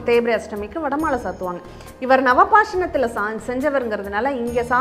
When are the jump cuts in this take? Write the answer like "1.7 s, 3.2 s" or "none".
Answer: none